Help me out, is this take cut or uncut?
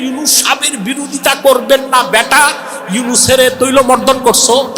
uncut